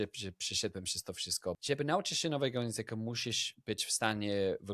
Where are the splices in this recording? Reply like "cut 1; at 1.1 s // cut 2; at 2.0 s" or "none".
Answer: cut 1; at 1.6 s

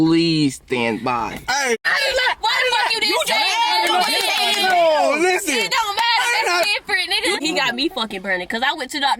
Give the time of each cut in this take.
cut 1; at 1.8 s // cut 2; at 7.4 s

